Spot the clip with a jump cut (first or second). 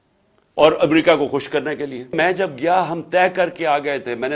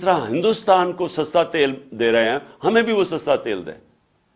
first